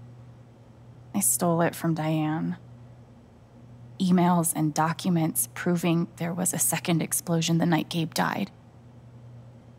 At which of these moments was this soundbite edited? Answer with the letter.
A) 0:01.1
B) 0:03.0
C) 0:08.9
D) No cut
A